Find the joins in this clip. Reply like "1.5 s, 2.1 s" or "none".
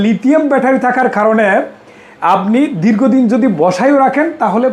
none